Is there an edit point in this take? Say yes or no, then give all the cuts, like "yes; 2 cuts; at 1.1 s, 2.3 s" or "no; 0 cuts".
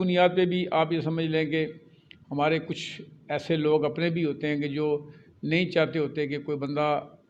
no; 0 cuts